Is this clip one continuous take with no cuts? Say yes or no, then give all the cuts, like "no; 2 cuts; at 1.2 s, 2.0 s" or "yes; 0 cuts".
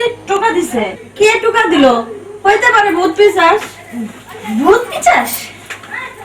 no; 1 cut; at 1.0 s